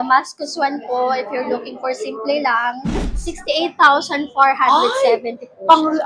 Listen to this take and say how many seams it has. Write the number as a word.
one